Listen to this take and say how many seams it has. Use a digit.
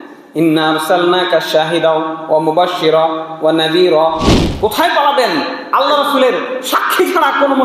1